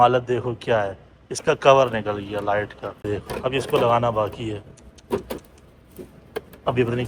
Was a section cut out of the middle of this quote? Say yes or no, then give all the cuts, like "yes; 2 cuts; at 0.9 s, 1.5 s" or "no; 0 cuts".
yes; 1 cut; at 3.1 s